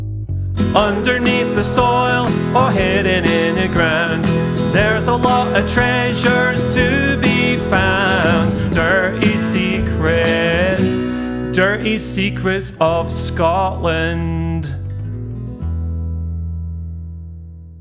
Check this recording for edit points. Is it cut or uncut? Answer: uncut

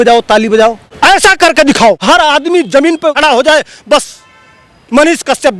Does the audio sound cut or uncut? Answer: cut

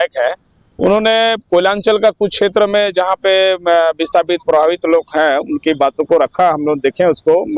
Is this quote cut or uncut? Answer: uncut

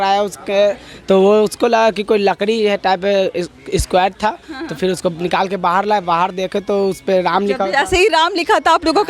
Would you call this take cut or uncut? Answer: uncut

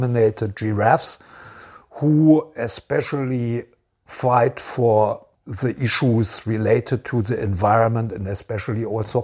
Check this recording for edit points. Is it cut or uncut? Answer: uncut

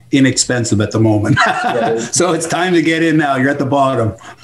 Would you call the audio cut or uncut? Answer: uncut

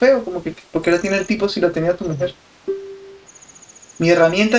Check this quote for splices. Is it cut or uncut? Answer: uncut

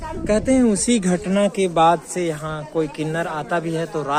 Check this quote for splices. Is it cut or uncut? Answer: uncut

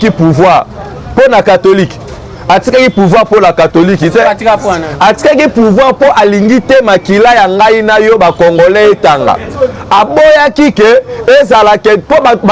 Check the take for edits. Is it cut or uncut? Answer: uncut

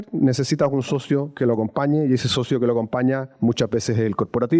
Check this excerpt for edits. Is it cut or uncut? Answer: uncut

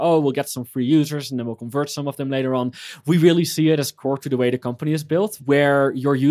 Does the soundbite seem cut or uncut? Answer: cut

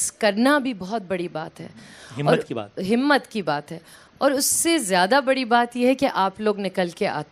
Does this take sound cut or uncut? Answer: uncut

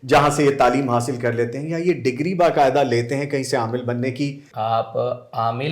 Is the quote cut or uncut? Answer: cut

